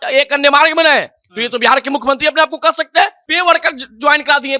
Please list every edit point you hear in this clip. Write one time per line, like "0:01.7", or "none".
0:03.2

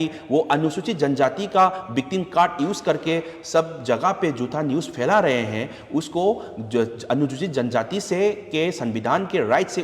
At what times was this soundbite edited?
none

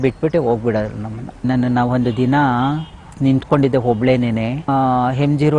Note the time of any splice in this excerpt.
0:01.5
0:03.0
0:04.7

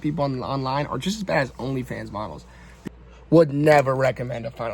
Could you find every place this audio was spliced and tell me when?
0:02.8

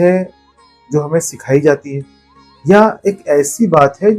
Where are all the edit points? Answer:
none

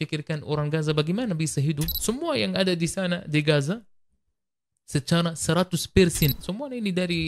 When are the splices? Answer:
0:01.9
0:06.4

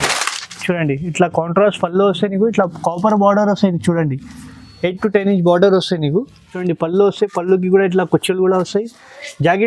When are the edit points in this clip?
0:06.6

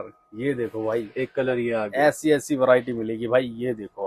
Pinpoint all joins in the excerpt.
none

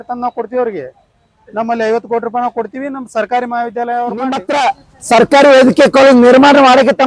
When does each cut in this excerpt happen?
0:04.4

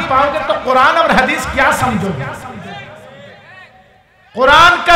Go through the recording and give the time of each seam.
none

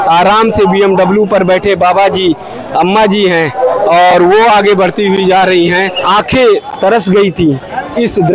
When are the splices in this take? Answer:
0:06.0

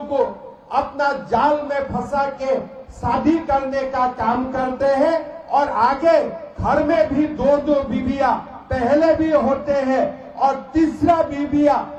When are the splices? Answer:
none

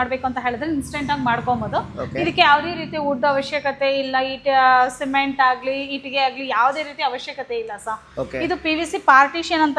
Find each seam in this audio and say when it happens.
none

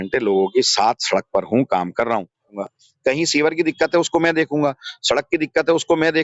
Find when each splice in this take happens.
0:02.5

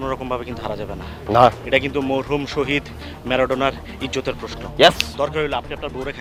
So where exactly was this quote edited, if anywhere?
none

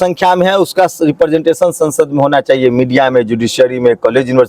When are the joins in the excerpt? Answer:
none

